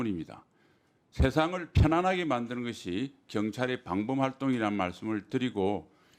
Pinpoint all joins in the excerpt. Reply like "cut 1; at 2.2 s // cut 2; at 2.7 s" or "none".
none